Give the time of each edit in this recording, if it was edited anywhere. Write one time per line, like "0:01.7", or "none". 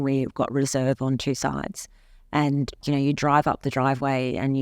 0:02.8